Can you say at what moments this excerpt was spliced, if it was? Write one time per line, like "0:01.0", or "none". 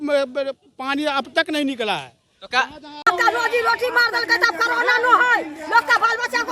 0:02.9